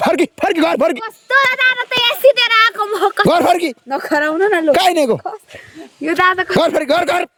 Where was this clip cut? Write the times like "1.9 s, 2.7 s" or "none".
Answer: none